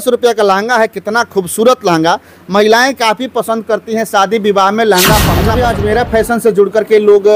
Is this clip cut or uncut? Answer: cut